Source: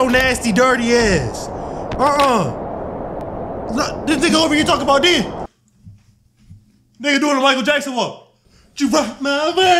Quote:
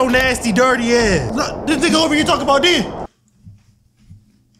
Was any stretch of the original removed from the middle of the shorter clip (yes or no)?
yes